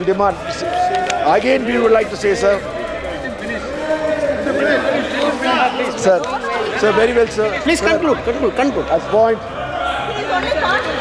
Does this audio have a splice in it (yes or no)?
no